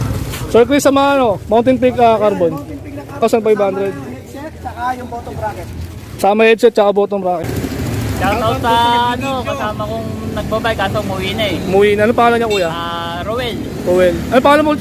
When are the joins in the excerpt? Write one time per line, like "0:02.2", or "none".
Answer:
0:03.2
0:07.8